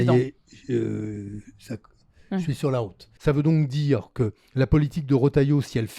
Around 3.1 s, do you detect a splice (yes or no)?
yes